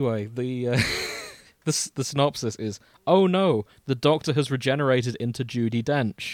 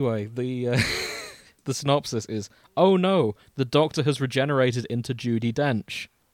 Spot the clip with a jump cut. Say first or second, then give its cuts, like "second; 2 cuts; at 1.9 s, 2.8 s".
second; 1 cut; at 1.5 s